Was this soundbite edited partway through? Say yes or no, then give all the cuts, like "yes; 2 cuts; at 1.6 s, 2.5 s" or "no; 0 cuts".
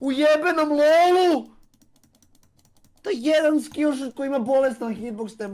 no; 0 cuts